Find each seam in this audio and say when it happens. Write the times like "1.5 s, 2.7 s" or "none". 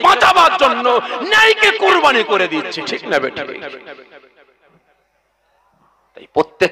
none